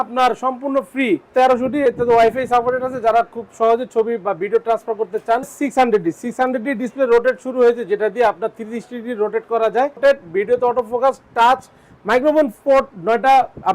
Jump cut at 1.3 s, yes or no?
yes